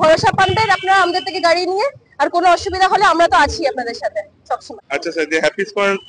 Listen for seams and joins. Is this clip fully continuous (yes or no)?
no